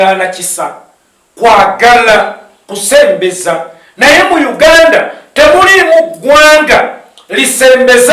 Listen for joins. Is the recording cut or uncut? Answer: uncut